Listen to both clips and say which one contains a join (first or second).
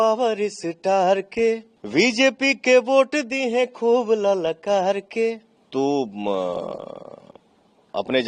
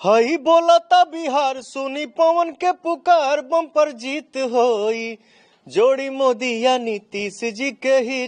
first